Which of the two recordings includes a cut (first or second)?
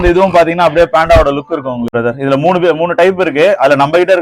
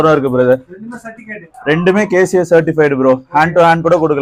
first